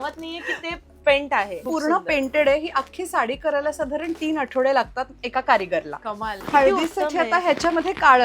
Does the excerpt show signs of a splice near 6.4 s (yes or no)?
yes